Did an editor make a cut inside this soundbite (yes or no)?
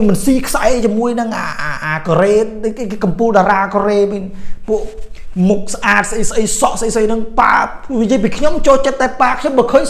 no